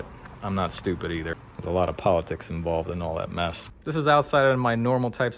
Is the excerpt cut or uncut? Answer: cut